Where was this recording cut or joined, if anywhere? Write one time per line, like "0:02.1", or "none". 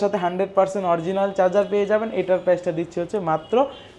none